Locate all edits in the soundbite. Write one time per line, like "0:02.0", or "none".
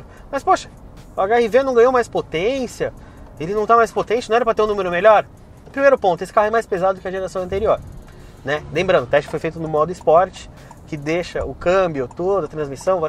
none